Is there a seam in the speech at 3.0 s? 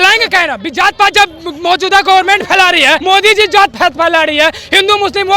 yes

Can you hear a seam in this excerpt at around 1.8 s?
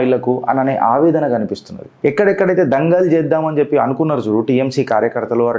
yes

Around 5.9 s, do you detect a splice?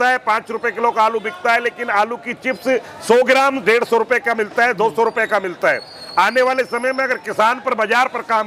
no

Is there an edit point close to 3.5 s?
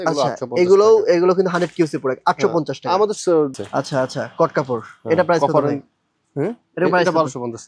yes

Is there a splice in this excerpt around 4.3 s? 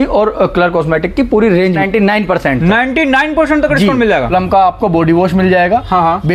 yes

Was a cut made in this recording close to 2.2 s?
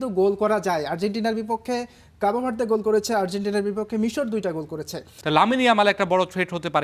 no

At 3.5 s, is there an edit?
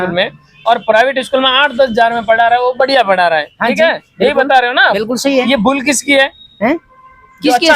no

